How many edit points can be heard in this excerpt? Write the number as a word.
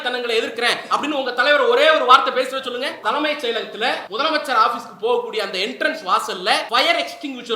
three